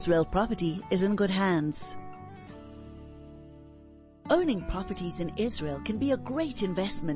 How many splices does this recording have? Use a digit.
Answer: 2